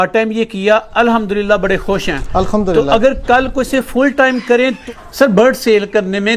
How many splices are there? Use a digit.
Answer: 1